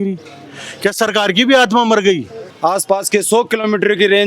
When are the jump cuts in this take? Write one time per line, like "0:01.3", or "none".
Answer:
0:02.3